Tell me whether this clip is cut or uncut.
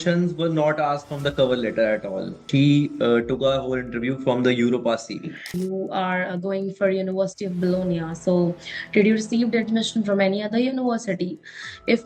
cut